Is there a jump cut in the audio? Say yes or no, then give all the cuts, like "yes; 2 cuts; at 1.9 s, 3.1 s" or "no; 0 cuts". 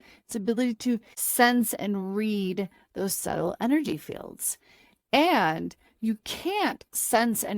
yes; 1 cut; at 1.2 s